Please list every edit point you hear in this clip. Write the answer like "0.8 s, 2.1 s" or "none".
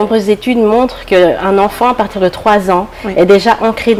none